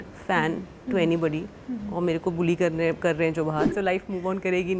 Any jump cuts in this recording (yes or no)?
yes